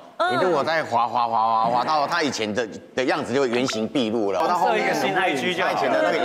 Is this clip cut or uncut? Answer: cut